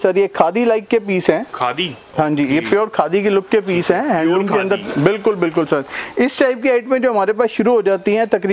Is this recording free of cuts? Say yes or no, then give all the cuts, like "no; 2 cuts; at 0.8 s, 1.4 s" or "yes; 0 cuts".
yes; 0 cuts